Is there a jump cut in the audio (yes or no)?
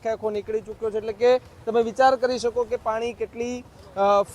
no